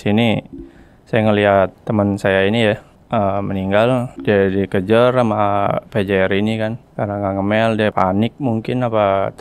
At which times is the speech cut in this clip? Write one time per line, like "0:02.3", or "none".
0:01.8
0:02.9
0:04.1
0:06.8
0:07.9